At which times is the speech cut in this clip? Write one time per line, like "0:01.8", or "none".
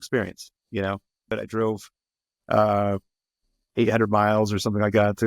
0:01.3

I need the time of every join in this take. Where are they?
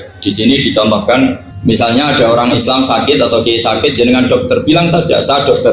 0:01.5

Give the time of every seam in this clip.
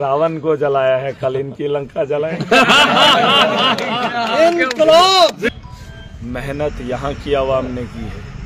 0:05.4

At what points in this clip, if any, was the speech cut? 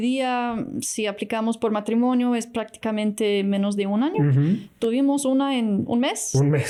none

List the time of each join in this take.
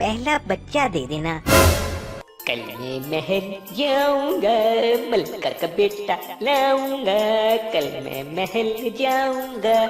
0:02.0

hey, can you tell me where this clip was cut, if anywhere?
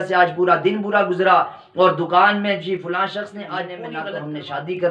0:03.9

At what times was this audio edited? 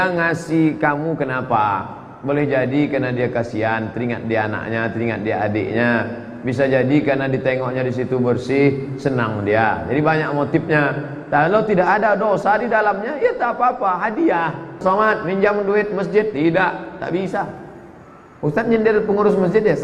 0:14.8

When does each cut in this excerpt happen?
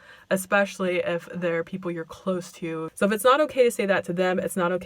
0:02.9

